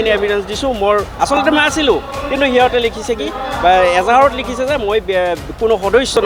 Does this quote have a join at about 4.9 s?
no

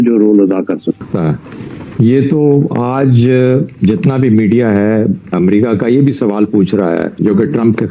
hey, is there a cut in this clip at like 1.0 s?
yes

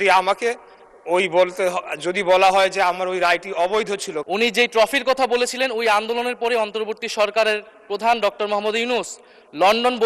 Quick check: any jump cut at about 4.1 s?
yes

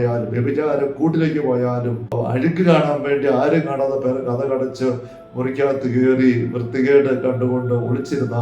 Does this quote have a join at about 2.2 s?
yes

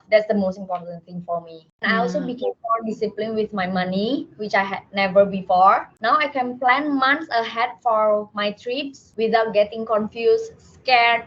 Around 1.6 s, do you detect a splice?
yes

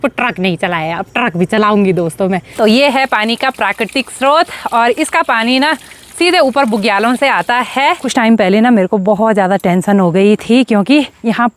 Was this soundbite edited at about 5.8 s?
no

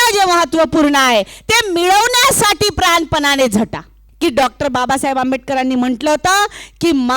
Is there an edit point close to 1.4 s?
no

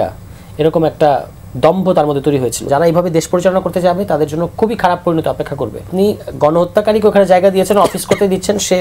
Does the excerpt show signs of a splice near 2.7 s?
yes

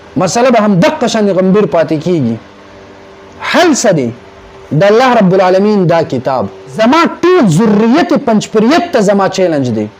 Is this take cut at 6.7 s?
yes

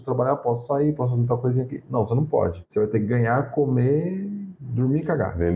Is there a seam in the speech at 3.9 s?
no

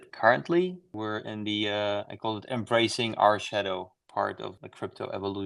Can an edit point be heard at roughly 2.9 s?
no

